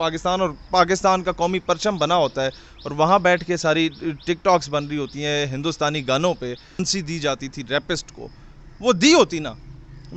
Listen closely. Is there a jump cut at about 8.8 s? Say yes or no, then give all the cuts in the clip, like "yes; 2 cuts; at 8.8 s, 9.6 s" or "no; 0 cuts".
no; 1 cut; at 6.8 s